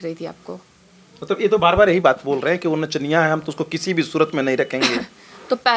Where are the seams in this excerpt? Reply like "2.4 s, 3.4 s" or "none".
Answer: none